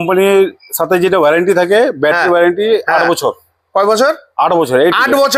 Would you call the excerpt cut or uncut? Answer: uncut